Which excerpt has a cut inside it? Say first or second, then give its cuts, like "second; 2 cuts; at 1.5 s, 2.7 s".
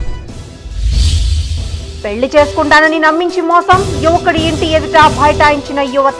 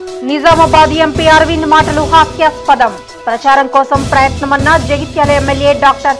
first; 1 cut; at 1.1 s